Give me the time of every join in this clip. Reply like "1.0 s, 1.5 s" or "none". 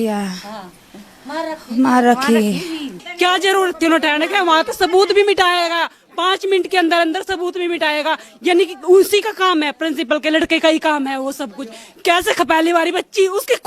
3.0 s